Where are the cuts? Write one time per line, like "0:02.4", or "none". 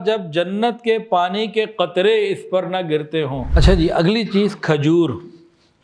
0:03.4